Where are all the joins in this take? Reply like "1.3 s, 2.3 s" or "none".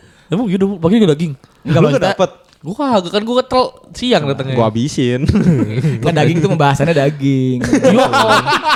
none